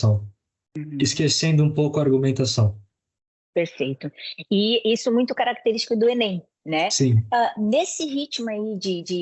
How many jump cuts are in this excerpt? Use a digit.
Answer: 0